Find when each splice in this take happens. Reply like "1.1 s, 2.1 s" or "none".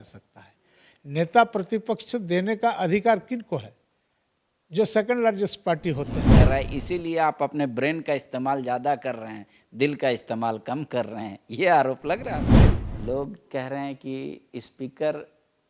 6.2 s, 12.6 s